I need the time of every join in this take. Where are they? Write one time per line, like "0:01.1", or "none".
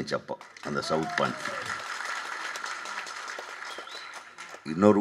none